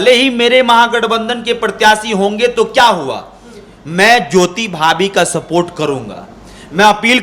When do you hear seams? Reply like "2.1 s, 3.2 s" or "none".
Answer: none

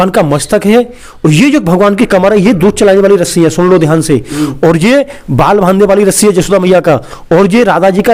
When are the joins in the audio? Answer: none

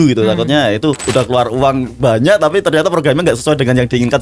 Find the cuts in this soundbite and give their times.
1.0 s

